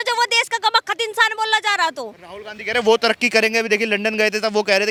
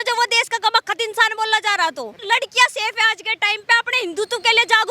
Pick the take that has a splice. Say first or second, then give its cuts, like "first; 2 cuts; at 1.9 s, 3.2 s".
second; 1 cut; at 2.2 s